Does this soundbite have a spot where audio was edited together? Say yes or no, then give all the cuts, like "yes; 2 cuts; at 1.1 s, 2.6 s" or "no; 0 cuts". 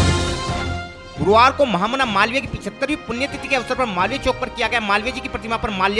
yes; 1 cut; at 1.0 s